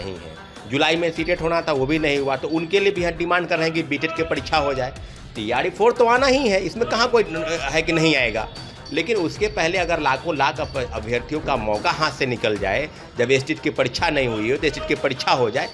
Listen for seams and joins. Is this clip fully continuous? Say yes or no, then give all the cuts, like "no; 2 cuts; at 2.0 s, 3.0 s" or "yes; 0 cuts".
yes; 0 cuts